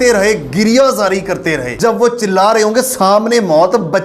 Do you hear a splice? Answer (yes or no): yes